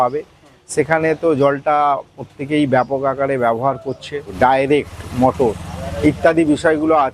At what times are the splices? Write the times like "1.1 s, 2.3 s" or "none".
4.2 s